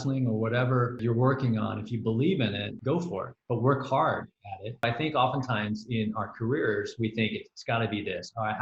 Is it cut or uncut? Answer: cut